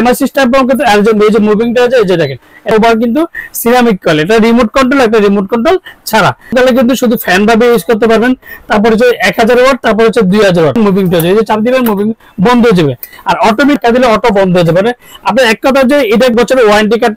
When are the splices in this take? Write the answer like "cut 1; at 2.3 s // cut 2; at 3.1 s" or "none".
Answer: cut 1; at 2.7 s // cut 2; at 6.5 s // cut 3; at 10.8 s // cut 4; at 13.8 s // cut 5; at 16.1 s